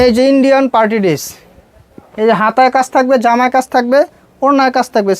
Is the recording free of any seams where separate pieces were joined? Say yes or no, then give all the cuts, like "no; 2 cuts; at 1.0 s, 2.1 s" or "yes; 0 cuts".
yes; 0 cuts